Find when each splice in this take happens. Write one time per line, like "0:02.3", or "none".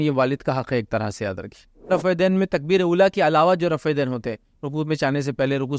0:01.9